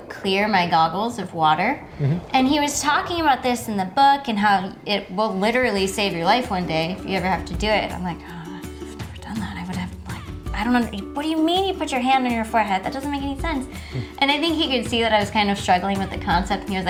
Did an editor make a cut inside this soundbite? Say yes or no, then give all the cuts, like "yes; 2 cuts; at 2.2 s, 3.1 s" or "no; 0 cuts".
no; 0 cuts